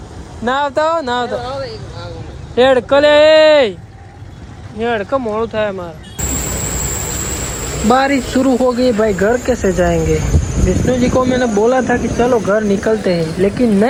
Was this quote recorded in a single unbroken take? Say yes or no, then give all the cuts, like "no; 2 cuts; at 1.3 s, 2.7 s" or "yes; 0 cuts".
yes; 0 cuts